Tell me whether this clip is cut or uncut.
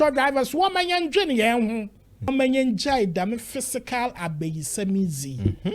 cut